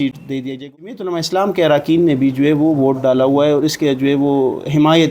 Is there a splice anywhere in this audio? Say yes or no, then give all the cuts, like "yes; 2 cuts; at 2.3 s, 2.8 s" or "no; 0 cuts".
yes; 1 cut; at 1.0 s